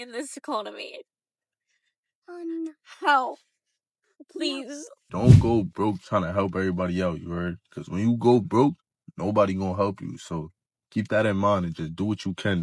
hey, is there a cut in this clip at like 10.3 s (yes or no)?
no